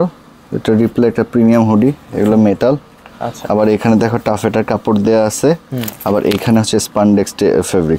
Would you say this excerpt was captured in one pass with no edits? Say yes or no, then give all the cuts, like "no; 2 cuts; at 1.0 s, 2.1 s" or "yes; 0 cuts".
yes; 0 cuts